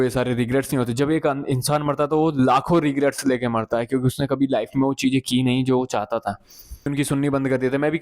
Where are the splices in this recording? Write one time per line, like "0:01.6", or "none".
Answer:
0:06.9